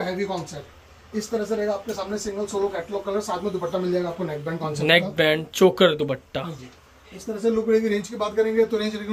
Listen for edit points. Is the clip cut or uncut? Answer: uncut